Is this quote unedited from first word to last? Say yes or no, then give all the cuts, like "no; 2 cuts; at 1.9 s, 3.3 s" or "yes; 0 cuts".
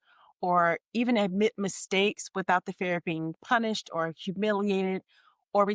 yes; 0 cuts